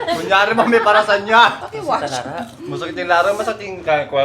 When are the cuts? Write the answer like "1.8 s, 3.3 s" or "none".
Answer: 1.6 s